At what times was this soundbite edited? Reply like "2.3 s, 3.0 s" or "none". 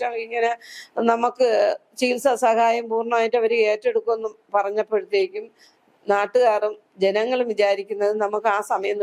none